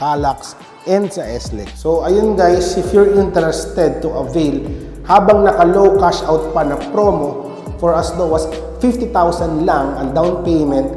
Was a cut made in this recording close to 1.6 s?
yes; 1 cut; at 1.6 s

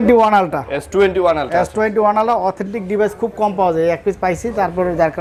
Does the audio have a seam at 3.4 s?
no; 0 cuts

